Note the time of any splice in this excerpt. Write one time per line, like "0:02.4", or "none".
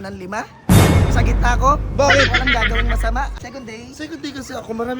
0:03.3